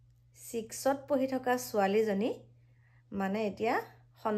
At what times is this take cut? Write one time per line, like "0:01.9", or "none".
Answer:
none

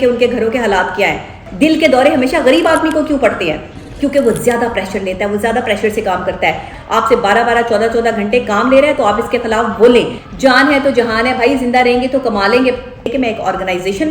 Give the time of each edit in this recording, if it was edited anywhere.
0:01.4
0:06.7
0:10.2
0:13.1

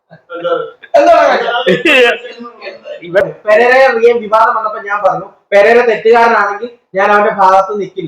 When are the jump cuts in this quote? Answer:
0:03.2

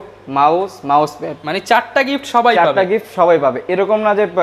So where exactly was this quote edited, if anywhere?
none

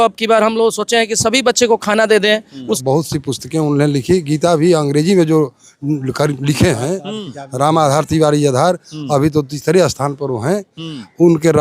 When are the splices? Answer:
0:02.8

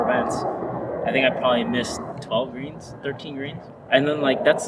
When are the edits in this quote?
0:02.1
0:03.7

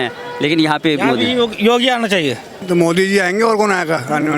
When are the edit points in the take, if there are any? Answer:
0:02.5

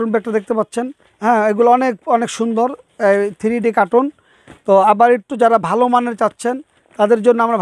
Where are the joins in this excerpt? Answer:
0:01.0

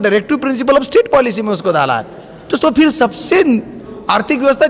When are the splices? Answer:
0:02.4

